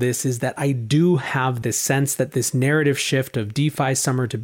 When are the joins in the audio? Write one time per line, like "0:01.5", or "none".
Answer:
0:01.6

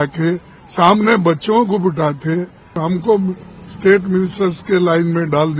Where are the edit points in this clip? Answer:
0:02.8

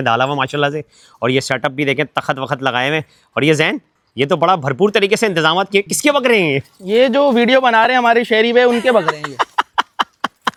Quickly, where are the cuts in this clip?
none

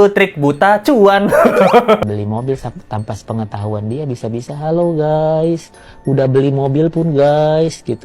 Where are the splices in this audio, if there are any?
0:02.0

